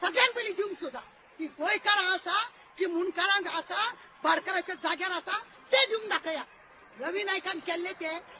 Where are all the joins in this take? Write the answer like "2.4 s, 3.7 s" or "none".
none